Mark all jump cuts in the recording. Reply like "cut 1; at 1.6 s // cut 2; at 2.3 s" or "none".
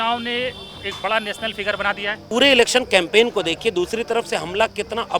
cut 1; at 2.2 s

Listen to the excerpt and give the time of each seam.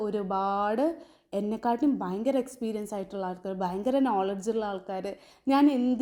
none

